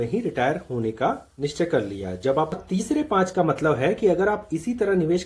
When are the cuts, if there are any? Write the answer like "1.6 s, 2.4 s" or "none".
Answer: 2.5 s